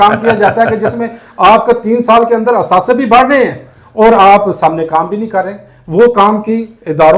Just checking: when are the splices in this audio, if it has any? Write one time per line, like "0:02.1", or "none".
none